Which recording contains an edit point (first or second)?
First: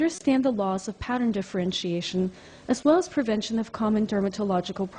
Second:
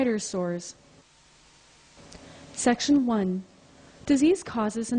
second